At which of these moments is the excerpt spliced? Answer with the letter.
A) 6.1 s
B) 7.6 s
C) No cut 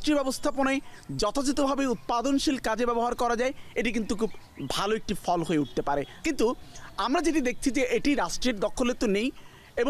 C